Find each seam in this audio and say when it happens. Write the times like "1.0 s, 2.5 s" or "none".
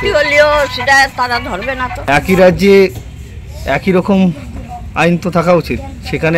2.2 s

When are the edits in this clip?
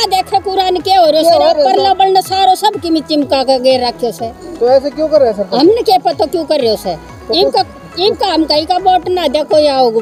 none

